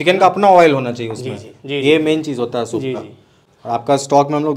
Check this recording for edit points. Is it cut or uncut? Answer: uncut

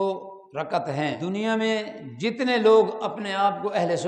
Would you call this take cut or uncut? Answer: cut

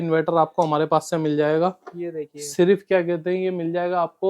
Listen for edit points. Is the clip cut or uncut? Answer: uncut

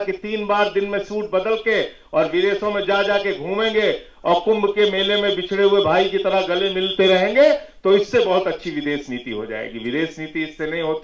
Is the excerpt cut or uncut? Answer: uncut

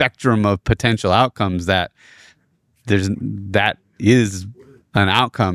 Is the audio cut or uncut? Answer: uncut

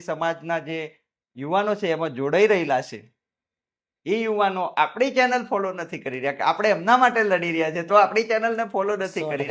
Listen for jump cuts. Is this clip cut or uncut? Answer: uncut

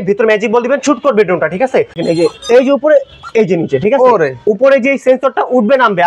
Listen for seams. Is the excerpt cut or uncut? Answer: cut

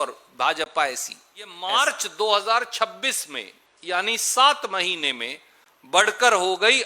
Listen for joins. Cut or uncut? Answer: cut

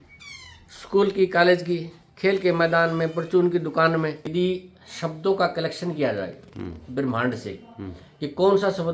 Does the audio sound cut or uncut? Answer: cut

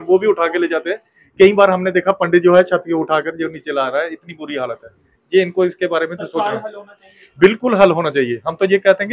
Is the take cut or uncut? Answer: uncut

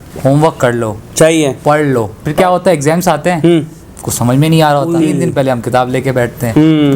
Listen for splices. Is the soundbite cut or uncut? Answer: cut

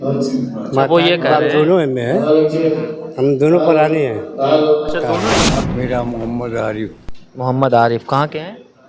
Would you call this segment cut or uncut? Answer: cut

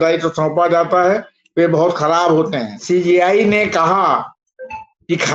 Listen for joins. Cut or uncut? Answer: cut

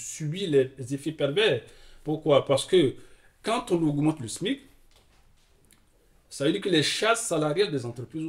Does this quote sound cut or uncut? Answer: uncut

